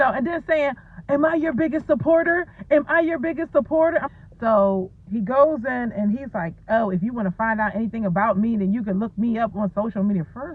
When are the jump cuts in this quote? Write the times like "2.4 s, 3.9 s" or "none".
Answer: 4.1 s

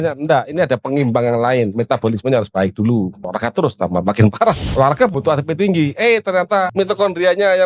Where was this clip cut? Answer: 3.3 s, 4.6 s, 6.7 s

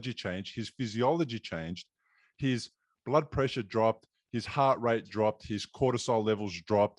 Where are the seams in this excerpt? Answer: none

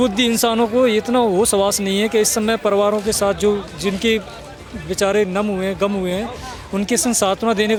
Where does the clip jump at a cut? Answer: none

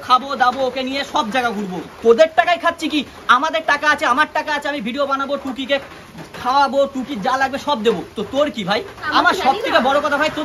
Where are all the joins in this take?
1.9 s, 9.0 s

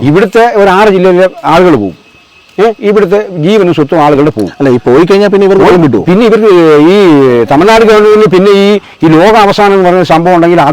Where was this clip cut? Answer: none

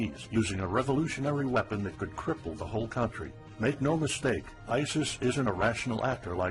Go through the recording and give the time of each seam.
1.3 s

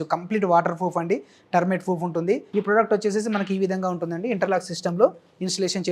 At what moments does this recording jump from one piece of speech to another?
2.5 s

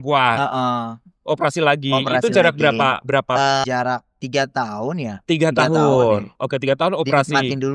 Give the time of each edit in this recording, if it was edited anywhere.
3.6 s

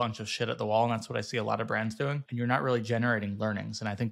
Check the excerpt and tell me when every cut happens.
2.2 s

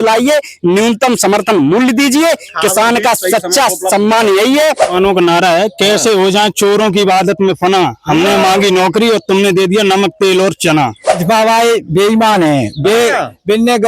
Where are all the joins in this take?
4.9 s, 11.1 s

